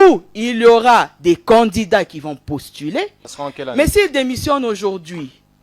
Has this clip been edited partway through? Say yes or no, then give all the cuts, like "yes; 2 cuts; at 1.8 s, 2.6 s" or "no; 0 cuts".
yes; 1 cut; at 3.3 s